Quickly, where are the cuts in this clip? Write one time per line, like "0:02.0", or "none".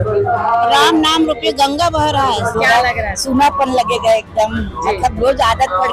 0:02.5

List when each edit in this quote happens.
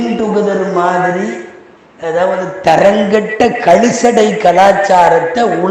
none

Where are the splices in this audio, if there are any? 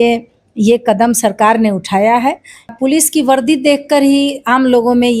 0:02.7

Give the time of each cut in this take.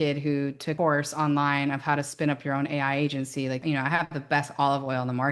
0:00.7
0:03.6

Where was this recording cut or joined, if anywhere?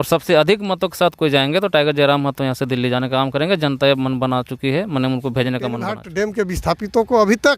0:06.0

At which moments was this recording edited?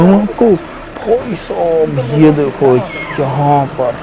none

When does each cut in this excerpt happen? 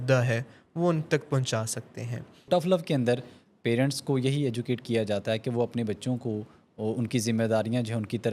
0:02.5

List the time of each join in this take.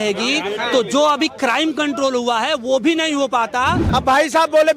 0:03.8

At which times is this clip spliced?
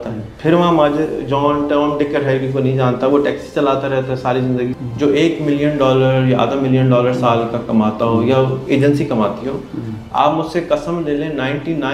0:04.7

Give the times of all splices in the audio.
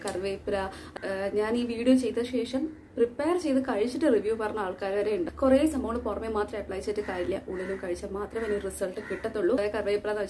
0:00.9
0:05.3
0:09.6

